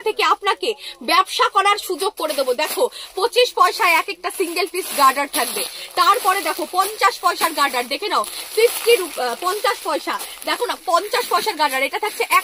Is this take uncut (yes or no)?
yes